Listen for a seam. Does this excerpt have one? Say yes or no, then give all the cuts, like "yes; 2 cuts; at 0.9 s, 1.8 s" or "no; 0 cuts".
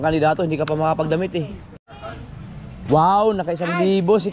yes; 1 cut; at 1.7 s